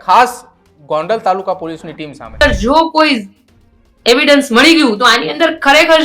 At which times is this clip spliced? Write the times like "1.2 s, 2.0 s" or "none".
2.4 s